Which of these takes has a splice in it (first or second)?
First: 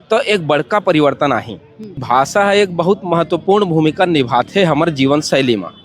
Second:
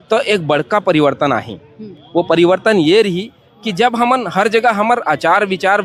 first